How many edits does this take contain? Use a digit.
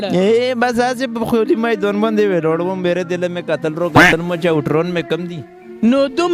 0